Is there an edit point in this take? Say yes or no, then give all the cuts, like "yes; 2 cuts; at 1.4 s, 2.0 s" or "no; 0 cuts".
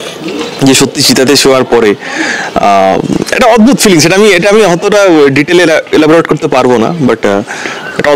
no; 0 cuts